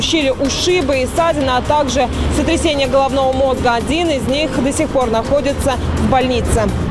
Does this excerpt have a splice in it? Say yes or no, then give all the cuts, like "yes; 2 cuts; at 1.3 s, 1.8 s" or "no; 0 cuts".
no; 0 cuts